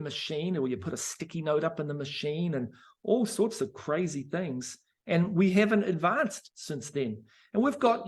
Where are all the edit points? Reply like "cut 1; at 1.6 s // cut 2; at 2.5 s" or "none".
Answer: none